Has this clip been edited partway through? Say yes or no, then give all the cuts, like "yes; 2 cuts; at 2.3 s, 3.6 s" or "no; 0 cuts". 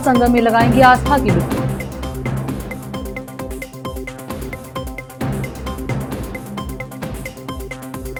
no; 0 cuts